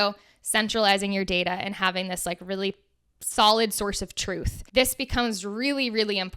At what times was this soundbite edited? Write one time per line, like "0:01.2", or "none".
0:04.5